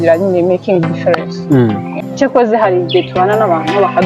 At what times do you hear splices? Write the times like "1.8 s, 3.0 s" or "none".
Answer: 1.9 s